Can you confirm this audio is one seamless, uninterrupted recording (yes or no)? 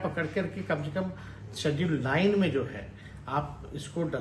yes